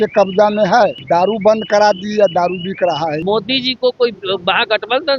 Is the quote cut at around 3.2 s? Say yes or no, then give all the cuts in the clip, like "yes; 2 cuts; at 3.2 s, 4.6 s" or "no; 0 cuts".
yes; 2 cuts; at 1.0 s, 3.2 s